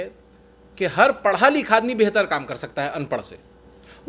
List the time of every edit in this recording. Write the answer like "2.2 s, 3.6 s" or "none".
none